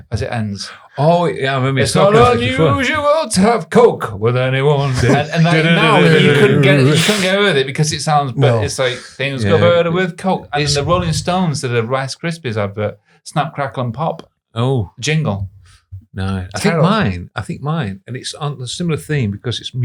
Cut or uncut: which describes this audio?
uncut